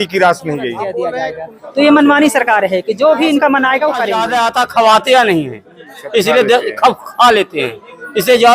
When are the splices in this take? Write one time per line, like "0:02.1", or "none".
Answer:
0:01.1
0:04.2